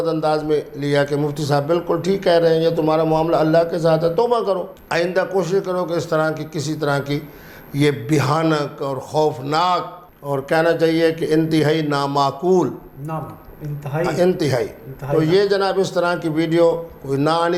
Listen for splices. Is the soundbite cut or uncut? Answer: uncut